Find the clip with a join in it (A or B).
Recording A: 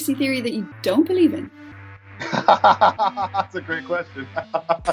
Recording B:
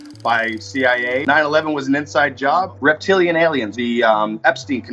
B